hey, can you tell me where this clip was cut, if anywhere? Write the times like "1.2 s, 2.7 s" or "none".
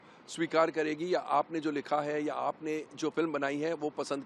none